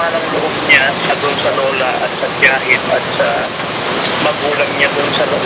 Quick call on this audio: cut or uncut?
uncut